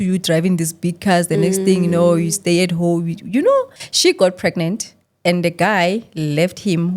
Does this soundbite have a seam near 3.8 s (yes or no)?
yes